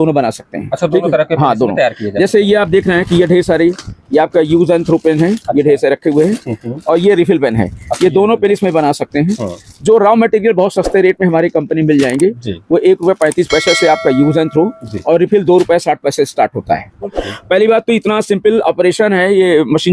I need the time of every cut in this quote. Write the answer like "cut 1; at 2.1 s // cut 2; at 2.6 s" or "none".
cut 1; at 17.2 s